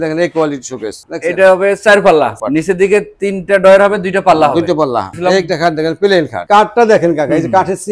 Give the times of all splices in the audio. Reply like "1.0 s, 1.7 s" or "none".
1.0 s, 2.4 s, 5.1 s, 6.4 s